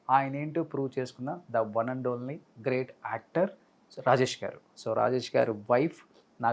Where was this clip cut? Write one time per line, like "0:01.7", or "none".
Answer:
0:04.8